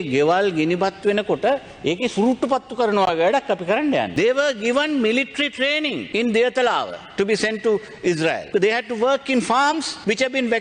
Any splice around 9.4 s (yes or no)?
no